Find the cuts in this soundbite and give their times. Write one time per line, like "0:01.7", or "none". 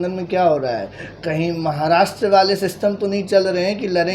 none